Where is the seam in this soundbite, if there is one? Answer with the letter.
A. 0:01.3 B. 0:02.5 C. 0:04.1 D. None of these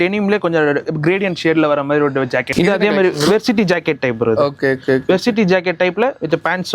B